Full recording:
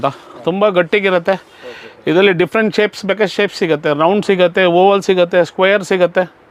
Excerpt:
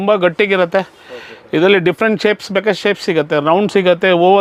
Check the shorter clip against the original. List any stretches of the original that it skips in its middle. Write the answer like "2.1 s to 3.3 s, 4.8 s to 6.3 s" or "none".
none